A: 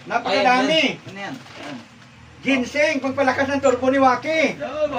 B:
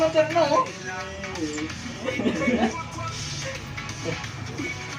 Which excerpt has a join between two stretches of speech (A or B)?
B